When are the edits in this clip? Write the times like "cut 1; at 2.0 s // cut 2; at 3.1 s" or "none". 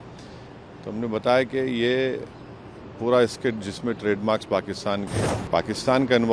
cut 1; at 5.2 s